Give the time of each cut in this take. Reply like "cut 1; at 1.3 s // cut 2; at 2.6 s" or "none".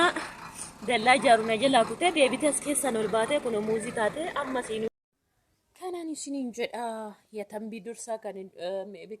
cut 1; at 4.9 s